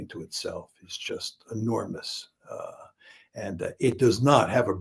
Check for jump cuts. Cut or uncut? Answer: uncut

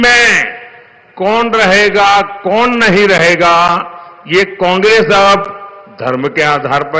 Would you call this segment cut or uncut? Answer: uncut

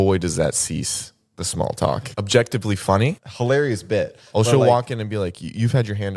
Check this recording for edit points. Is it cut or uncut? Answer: cut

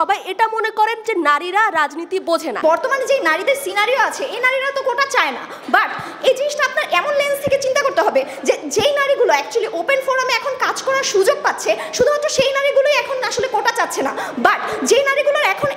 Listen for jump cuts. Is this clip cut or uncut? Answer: cut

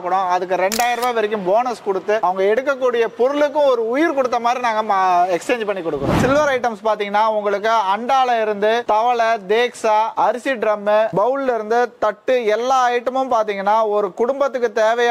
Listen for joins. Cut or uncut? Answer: cut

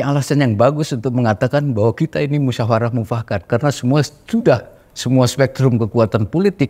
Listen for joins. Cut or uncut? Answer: uncut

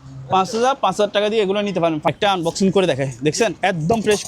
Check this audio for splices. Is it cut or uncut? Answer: cut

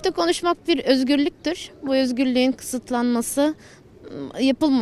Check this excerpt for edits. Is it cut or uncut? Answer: uncut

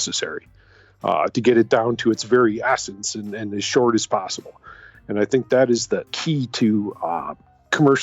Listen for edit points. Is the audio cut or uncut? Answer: cut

